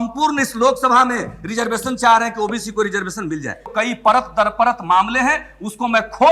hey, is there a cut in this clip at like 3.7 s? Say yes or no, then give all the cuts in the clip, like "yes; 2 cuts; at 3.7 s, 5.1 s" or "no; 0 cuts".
yes; 1 cut; at 3.7 s